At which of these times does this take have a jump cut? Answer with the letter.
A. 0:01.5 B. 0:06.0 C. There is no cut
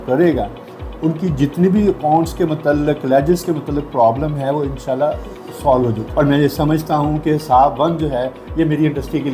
B